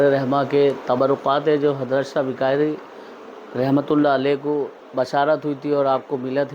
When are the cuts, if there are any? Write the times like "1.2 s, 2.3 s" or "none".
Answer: 4.8 s